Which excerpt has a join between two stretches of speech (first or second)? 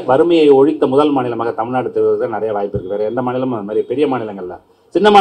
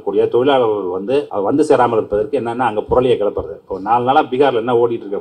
second